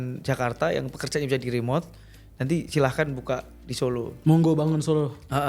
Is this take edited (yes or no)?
no